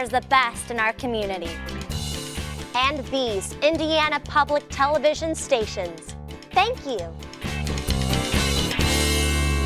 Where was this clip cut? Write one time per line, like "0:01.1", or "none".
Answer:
0:07.2